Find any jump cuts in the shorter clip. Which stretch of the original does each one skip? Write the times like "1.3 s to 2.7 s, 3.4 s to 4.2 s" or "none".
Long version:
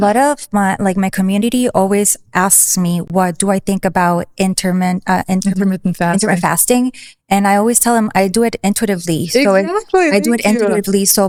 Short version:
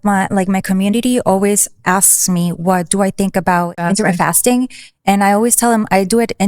4.3 s to 6.0 s